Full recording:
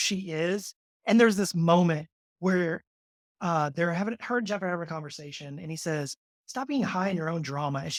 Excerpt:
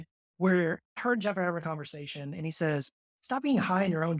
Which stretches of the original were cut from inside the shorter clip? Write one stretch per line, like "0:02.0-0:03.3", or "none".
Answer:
0:03.0-0:04.2